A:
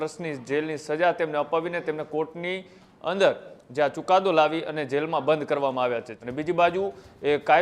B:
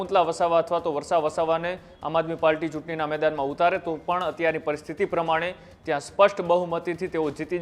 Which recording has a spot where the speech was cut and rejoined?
A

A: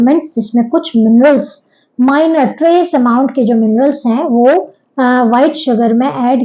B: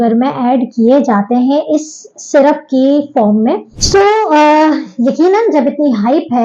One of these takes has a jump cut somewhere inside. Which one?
B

